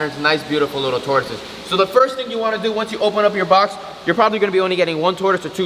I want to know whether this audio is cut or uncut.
uncut